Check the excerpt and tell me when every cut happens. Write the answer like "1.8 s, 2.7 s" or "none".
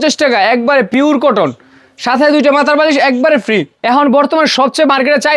3.7 s